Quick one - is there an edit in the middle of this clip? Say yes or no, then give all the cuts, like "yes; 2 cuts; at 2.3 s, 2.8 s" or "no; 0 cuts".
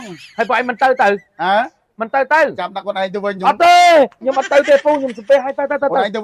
no; 0 cuts